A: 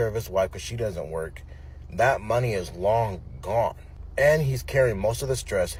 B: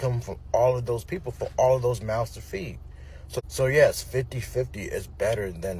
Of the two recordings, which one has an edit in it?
B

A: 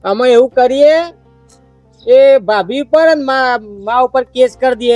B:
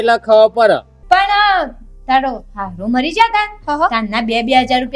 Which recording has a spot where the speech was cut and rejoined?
B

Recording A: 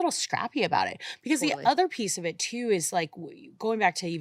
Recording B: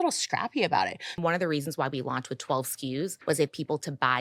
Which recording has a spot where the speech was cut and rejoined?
B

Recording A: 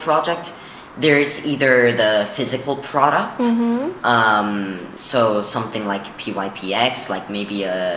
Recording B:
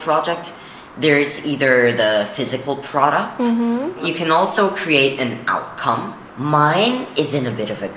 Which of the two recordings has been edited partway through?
B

